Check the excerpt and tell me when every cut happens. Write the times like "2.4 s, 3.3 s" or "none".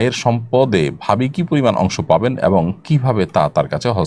none